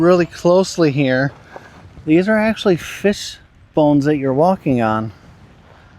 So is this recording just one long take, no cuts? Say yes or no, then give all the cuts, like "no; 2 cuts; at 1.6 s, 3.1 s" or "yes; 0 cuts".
yes; 0 cuts